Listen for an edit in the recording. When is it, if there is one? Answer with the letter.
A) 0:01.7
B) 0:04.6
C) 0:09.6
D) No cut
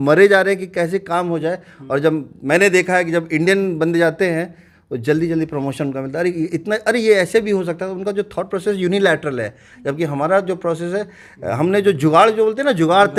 D